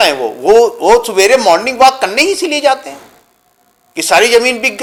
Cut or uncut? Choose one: uncut